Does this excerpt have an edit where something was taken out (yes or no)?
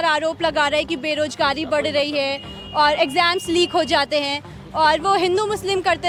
no